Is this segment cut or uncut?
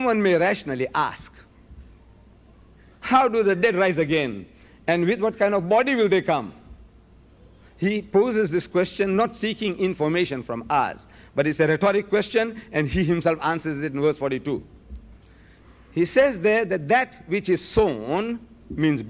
uncut